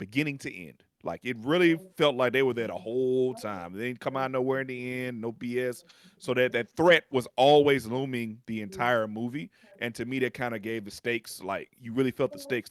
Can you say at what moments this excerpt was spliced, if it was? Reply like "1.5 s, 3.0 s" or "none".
none